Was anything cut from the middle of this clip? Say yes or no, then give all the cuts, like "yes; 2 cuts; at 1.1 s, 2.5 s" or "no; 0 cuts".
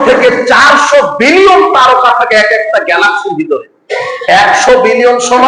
no; 0 cuts